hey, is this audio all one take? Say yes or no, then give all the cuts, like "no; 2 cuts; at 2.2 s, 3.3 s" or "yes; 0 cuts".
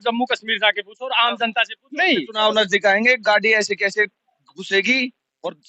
no; 1 cut; at 2.3 s